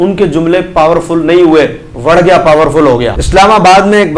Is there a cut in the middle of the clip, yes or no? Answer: yes